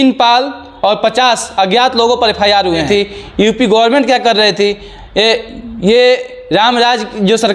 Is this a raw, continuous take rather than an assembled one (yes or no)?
no